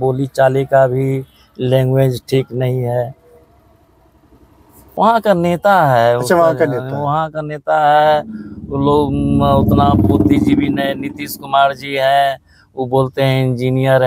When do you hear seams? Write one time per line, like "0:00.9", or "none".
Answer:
0:05.3